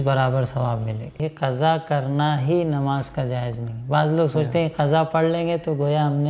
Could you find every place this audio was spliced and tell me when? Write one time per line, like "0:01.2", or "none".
0:01.2